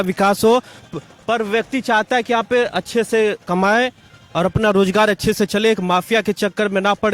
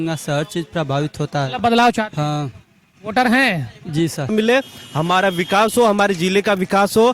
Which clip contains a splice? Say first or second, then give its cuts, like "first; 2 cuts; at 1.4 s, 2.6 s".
second; 1 cut; at 4.3 s